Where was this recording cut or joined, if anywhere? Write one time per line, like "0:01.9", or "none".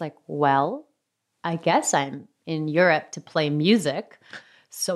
none